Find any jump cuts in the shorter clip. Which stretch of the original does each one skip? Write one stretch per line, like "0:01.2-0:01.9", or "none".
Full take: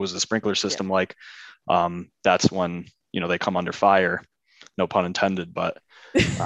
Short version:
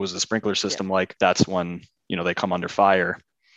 0:01.1-0:02.2